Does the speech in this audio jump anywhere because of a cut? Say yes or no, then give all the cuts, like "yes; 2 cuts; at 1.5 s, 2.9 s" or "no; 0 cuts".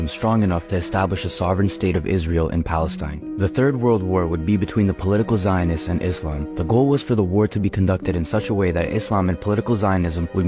no; 0 cuts